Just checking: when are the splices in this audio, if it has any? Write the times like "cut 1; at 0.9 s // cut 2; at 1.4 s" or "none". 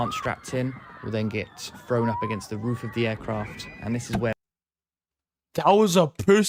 none